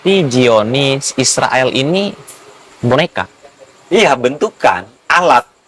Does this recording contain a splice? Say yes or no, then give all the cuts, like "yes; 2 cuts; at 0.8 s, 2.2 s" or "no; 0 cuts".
no; 0 cuts